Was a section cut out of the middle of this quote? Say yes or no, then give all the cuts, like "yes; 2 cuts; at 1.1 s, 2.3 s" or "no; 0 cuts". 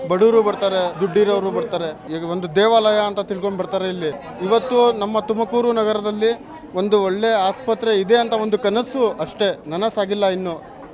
yes; 4 cuts; at 0.9 s, 2.0 s, 4.3 s, 9.6 s